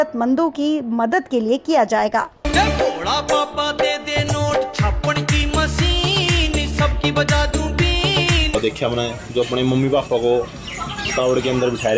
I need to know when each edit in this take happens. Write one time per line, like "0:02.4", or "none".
0:02.4
0:08.5

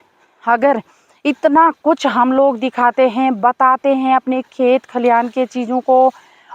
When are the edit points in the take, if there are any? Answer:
none

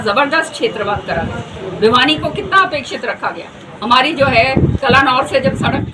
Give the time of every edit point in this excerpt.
none

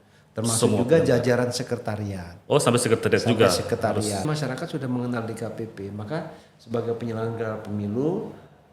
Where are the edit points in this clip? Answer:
0:04.3

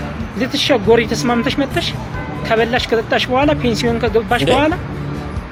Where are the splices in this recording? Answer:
none

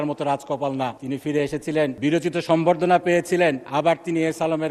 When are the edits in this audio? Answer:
0:01.0
0:01.9
0:03.6

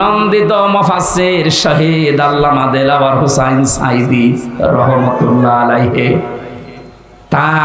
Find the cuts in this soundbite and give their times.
none

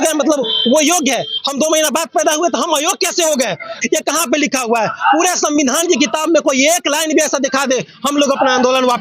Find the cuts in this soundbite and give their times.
0:03.8

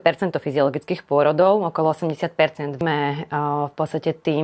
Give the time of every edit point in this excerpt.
0:02.8

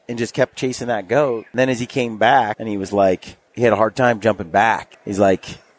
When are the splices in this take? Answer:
0:01.5
0:02.6
0:03.4
0:04.9

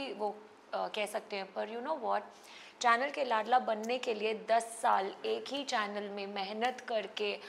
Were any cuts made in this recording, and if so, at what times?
none

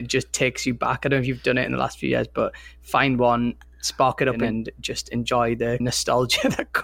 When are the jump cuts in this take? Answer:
0:04.4
0:05.8

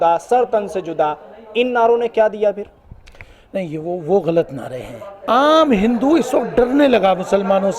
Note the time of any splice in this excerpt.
0:05.3

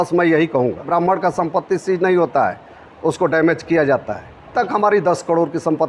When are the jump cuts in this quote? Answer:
0:00.9
0:04.5

